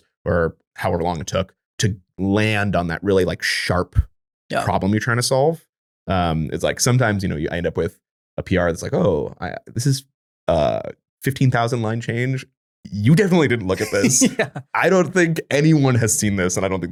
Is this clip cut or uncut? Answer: uncut